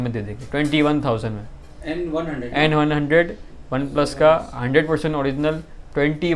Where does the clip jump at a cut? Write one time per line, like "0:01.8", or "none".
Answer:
none